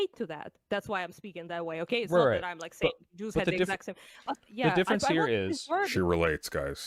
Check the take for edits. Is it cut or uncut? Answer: uncut